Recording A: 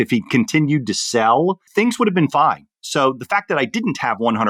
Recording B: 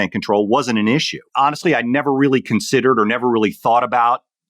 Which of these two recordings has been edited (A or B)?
B